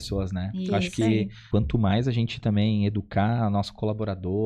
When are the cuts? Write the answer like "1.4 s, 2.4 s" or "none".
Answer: 1.4 s